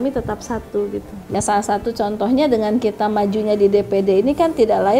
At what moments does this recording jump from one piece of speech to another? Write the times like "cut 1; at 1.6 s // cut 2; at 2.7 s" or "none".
cut 1; at 1.2 s